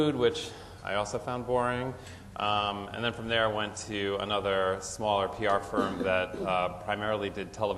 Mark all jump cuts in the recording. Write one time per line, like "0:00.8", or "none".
0:05.5